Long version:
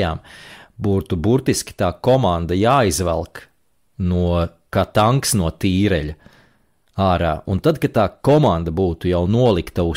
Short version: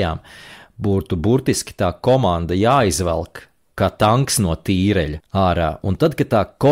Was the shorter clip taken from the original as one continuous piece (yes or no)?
no